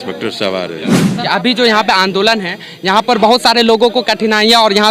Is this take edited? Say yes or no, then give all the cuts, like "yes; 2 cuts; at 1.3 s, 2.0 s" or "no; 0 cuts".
yes; 1 cut; at 1.1 s